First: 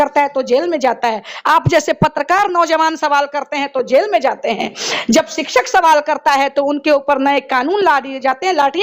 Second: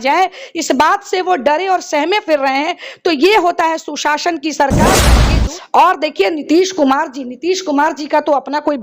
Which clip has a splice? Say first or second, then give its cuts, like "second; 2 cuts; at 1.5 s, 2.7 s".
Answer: second; 1 cut; at 5.1 s